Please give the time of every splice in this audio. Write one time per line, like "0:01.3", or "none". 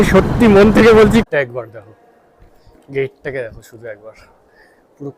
0:01.3